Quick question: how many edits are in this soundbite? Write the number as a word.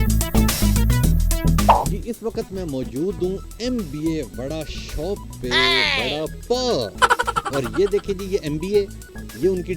one